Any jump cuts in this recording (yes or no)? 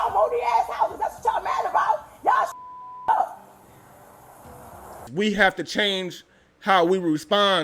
yes